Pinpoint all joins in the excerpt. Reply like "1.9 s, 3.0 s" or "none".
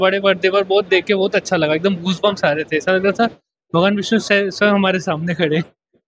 none